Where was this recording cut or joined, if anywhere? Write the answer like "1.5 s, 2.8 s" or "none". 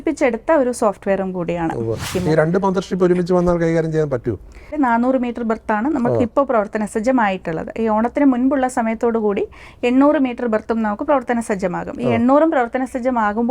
2.1 s, 4.7 s